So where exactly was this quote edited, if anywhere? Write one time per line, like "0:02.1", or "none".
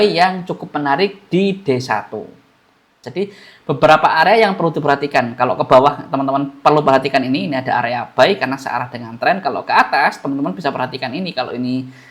0:03.0